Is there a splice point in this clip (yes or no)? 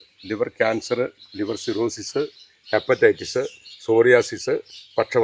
no